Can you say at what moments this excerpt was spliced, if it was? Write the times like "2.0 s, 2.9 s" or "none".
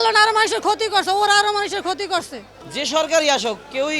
2.6 s